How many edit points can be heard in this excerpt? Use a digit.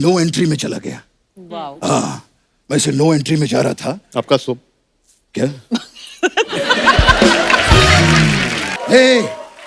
1